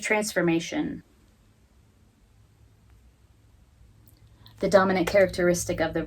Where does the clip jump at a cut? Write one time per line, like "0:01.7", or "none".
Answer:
0:01.1